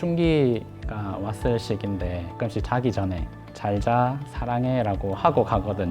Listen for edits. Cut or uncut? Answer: cut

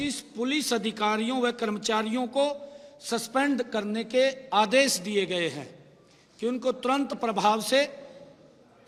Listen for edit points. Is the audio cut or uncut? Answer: uncut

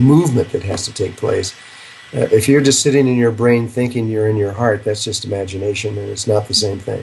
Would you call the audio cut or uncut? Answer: uncut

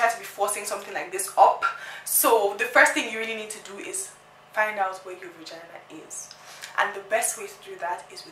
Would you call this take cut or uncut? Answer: uncut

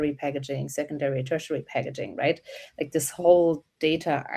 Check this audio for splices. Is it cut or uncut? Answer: uncut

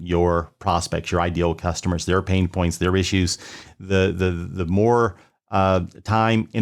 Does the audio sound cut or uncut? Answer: uncut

